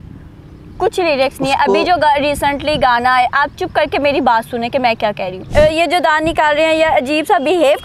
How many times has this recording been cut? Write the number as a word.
one